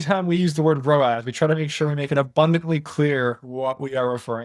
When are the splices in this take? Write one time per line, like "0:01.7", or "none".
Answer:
none